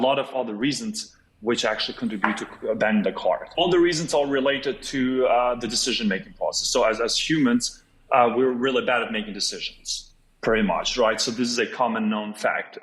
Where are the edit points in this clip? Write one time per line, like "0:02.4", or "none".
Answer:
0:03.5